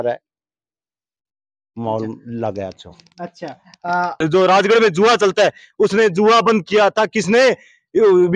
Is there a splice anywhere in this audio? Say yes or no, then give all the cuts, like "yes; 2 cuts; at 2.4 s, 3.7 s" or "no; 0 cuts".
yes; 1 cut; at 4.2 s